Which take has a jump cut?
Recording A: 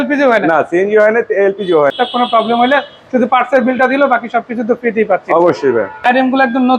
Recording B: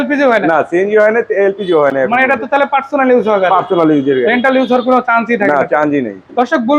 A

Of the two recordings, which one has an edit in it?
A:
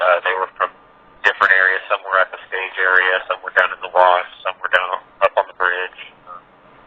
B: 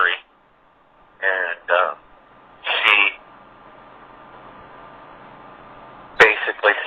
A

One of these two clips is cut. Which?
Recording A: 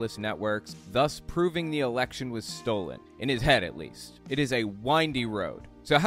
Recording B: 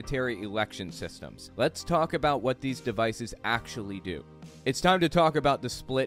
B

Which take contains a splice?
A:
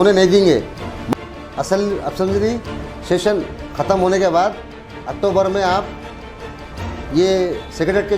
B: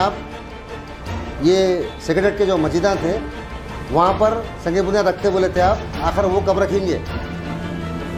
A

